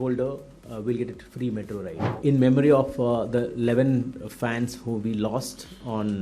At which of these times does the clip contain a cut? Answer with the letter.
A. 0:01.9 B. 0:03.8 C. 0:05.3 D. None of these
A